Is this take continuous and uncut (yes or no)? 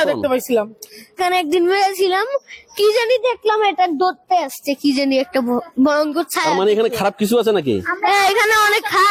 no